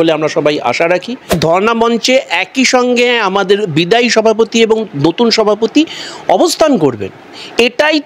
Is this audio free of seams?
no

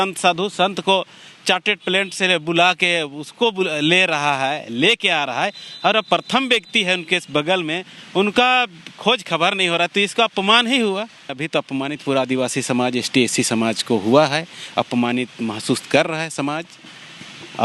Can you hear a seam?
yes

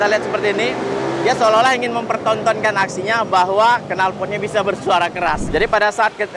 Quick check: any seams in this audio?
yes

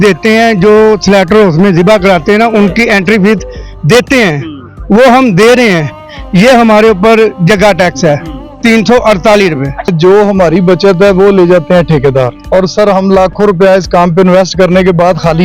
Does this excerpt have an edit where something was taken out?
yes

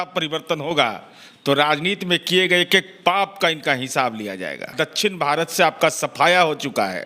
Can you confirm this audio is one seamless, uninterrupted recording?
no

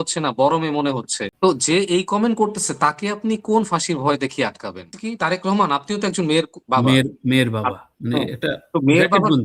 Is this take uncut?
no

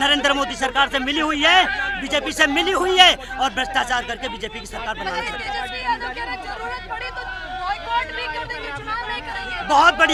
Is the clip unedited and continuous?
yes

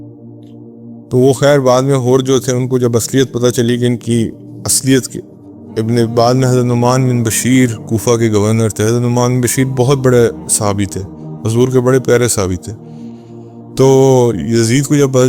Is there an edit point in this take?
yes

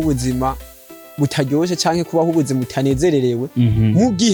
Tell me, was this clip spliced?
no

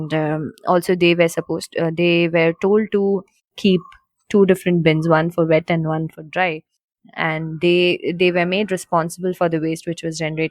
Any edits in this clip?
no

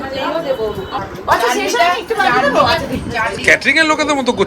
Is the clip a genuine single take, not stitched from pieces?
no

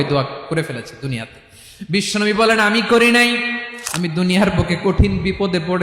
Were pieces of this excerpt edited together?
yes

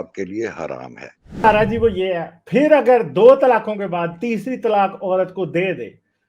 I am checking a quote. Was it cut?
yes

